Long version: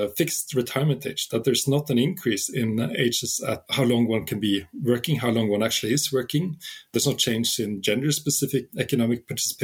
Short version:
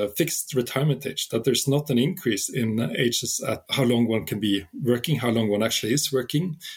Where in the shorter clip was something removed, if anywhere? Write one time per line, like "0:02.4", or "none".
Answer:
none